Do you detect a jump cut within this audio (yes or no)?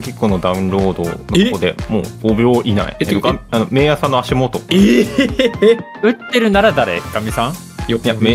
yes